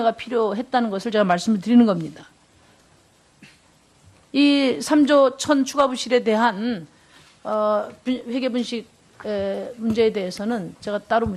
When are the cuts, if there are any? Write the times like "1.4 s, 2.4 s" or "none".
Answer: 4.4 s